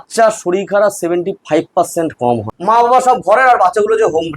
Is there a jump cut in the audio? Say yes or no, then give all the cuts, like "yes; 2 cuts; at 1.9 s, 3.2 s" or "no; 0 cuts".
yes; 1 cut; at 2.5 s